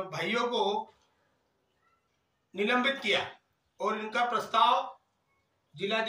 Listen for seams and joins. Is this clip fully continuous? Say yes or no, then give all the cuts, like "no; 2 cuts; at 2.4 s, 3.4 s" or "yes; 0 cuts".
yes; 0 cuts